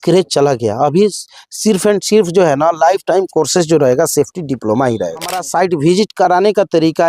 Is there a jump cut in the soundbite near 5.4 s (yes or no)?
yes